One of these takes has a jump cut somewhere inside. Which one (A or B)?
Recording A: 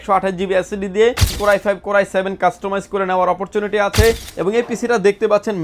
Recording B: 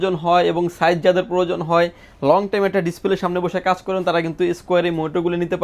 A